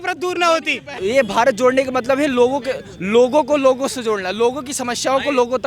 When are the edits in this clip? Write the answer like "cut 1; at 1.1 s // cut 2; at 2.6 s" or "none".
cut 1; at 1.0 s